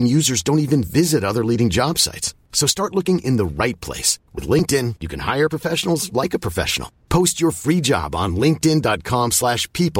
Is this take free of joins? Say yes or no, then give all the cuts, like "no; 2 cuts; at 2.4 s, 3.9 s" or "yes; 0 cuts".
yes; 0 cuts